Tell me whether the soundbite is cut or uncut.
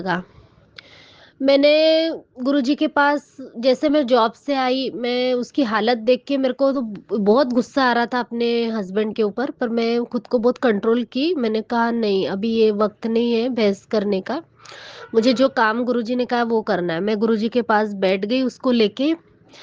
uncut